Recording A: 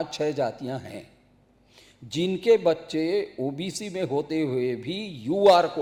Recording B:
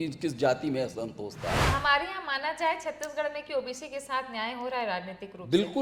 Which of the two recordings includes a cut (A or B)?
B